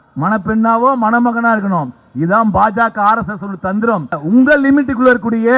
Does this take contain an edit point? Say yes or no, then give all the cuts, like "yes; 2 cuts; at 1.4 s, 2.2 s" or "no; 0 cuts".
yes; 1 cut; at 4.2 s